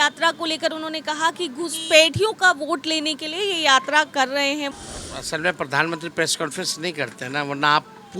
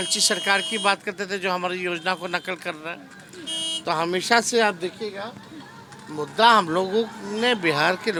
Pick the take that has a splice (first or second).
first